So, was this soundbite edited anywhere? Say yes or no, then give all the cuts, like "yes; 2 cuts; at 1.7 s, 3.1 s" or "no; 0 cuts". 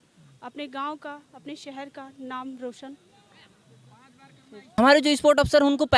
yes; 1 cut; at 4.5 s